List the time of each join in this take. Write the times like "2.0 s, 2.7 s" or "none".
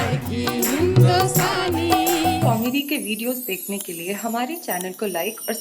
2.4 s